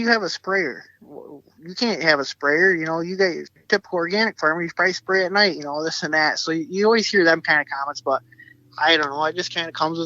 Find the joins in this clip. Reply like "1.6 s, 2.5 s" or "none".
3.5 s